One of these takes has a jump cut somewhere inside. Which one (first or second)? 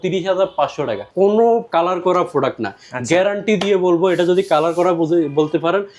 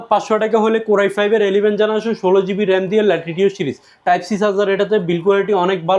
first